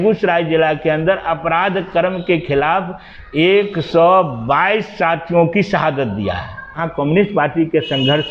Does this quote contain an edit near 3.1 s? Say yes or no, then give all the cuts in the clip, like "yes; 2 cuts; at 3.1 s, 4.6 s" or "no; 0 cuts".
no; 1 cut; at 6.8 s